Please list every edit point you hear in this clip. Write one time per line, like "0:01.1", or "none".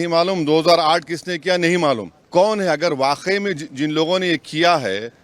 0:02.1